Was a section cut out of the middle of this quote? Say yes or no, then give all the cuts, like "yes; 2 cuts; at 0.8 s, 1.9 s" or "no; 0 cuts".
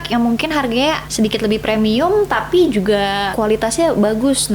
yes; 2 cuts; at 1.1 s, 3.3 s